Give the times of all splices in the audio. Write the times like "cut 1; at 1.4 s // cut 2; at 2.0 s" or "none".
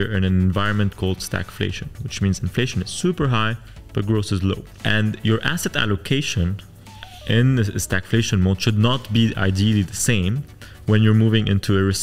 cut 1; at 4.7 s